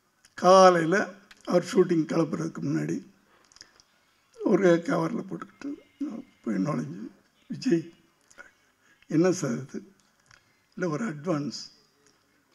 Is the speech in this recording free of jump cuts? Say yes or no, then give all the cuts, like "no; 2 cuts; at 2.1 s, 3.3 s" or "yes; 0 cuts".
yes; 0 cuts